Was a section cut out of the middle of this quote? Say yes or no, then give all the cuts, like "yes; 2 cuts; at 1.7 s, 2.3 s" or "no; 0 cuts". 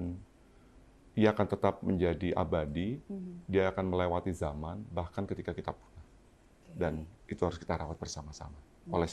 no; 0 cuts